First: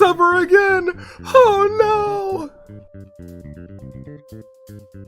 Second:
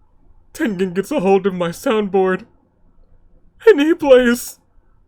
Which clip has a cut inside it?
first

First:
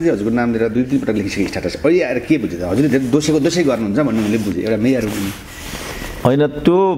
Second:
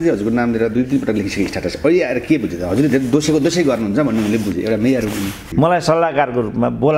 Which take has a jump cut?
second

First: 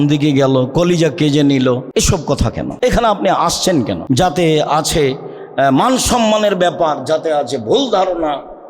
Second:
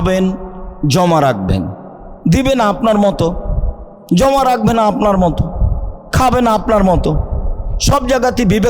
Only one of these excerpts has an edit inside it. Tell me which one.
first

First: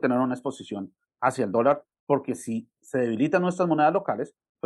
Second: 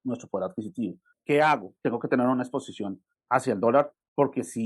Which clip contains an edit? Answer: second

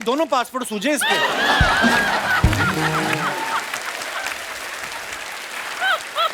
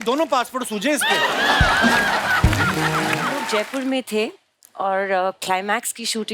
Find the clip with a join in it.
second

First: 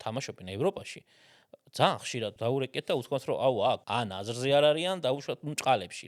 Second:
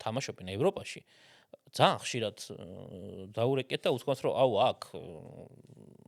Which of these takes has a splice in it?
first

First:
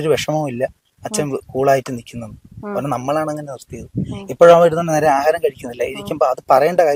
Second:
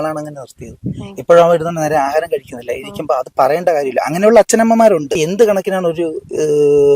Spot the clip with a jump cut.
second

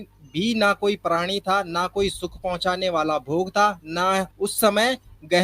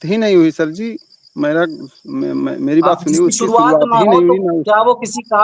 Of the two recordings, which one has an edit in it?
first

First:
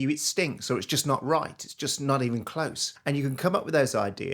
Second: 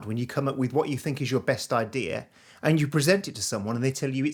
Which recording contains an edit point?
first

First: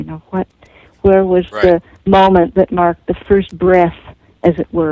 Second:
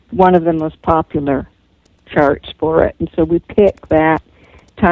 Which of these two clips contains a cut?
second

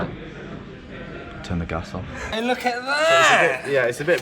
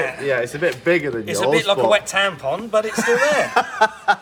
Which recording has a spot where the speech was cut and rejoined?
first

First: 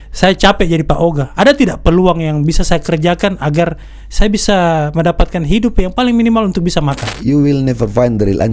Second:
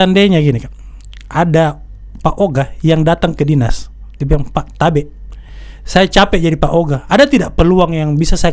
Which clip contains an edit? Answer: first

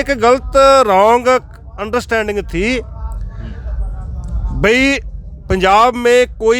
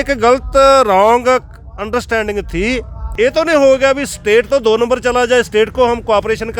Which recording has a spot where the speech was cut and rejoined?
second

